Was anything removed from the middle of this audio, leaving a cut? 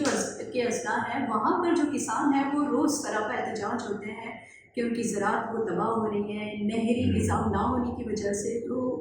no; 0 cuts

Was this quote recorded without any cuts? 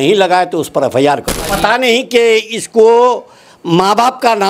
no; 1 cut; at 1.5 s

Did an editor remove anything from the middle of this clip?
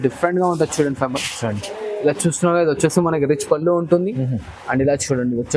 no; 0 cuts

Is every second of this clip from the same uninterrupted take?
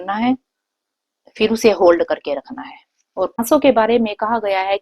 no; 1 cut; at 3.4 s

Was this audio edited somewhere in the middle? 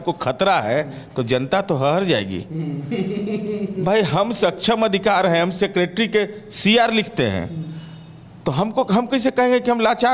no; 0 cuts

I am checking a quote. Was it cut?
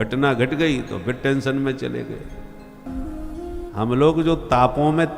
yes; 1 cut; at 2.9 s

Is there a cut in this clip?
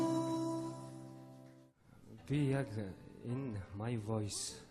no; 0 cuts

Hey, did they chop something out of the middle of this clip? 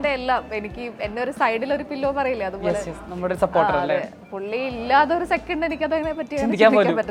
no; 0 cuts

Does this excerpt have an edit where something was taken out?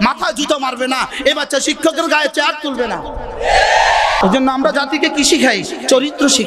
yes; 1 cut; at 4.2 s

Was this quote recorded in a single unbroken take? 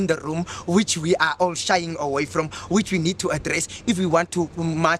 yes; 0 cuts

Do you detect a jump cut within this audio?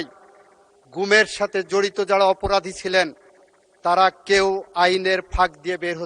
no; 0 cuts

